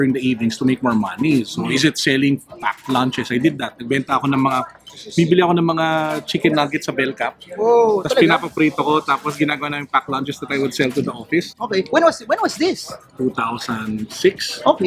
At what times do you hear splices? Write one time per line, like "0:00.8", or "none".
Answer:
none